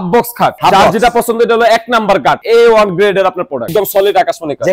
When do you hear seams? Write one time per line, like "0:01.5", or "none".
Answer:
0:02.4
0:03.7